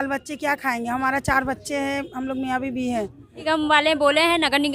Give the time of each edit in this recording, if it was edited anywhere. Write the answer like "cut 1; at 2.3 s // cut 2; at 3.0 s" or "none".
cut 1; at 3.4 s